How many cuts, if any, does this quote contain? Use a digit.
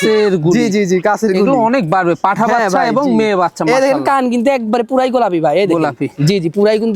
0